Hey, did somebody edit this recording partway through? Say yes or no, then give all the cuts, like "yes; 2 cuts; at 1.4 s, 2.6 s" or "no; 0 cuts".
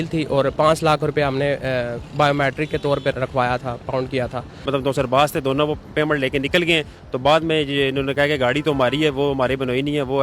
yes; 2 cuts; at 3.1 s, 4.5 s